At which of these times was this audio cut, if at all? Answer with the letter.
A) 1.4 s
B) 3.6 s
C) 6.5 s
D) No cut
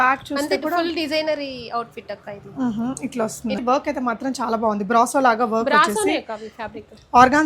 B